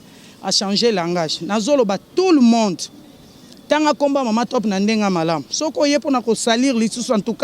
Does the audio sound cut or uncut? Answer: uncut